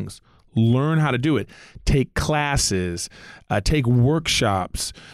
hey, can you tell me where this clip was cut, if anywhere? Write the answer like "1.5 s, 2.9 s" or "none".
none